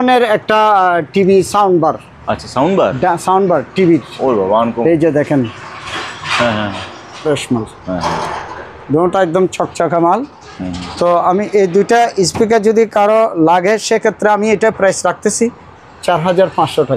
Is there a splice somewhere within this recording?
yes; 1 cut; at 7.2 s

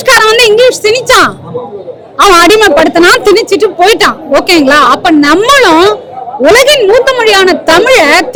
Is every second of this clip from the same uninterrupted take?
yes; 0 cuts

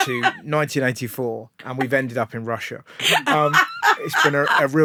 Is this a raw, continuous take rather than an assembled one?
yes; 0 cuts

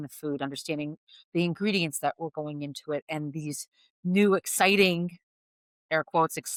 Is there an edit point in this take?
no; 0 cuts

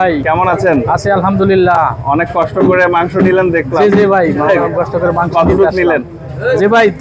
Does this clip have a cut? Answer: no; 0 cuts

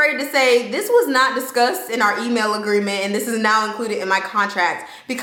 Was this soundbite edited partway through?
no; 0 cuts

